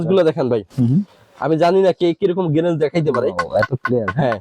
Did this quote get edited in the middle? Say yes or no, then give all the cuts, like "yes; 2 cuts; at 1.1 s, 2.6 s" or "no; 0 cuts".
no; 0 cuts